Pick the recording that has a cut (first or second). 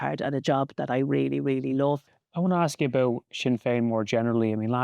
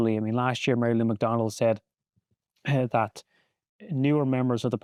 first